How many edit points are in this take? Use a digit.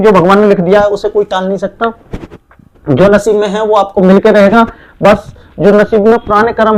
0